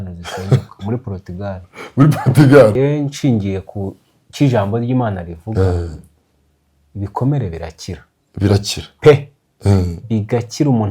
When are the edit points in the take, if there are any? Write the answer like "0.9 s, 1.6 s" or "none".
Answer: 2.7 s